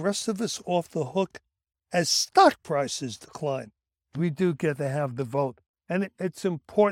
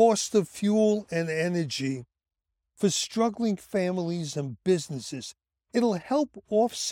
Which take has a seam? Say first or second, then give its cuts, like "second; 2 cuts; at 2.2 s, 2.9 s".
first; 1 cut; at 4.0 s